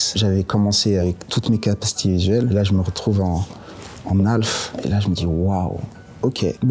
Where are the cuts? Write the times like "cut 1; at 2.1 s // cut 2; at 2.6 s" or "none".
none